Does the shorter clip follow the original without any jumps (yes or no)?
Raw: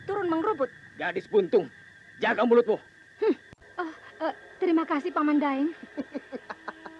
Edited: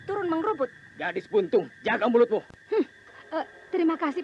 no